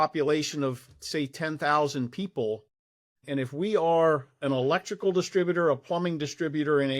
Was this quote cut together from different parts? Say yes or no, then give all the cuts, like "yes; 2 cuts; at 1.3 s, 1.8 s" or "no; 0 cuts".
no; 0 cuts